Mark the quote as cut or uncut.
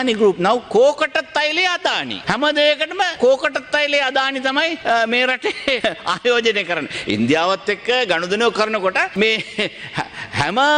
cut